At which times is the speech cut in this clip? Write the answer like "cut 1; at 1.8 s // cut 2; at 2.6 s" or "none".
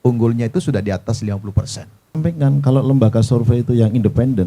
cut 1; at 2.2 s